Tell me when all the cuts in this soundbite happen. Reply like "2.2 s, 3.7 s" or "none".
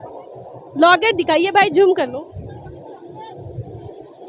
none